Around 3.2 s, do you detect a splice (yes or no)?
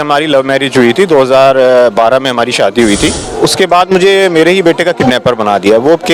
yes